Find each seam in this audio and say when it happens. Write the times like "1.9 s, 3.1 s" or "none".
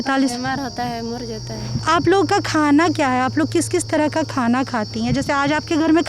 1.8 s